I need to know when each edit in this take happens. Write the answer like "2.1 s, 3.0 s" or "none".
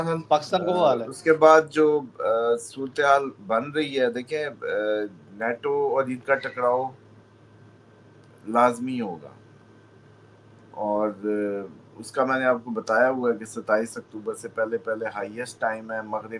none